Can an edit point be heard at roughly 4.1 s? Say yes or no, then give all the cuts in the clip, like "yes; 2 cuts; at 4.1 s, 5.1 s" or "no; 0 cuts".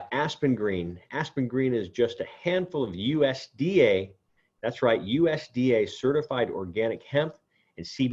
no; 0 cuts